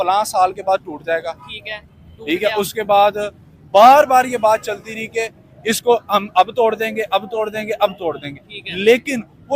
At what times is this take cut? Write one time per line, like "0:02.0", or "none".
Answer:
none